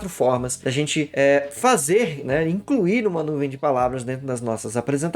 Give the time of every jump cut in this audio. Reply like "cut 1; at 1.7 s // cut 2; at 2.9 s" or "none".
none